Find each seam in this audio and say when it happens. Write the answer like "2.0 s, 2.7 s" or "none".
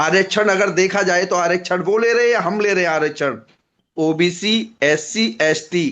3.8 s